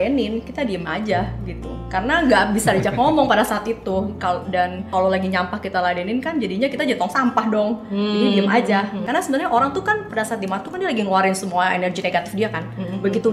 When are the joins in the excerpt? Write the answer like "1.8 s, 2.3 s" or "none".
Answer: 4.9 s, 9.0 s